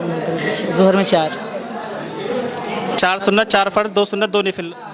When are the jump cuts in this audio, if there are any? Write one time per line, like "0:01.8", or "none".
none